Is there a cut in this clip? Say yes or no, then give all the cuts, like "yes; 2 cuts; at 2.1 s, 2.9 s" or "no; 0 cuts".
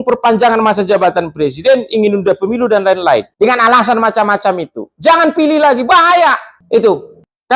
no; 0 cuts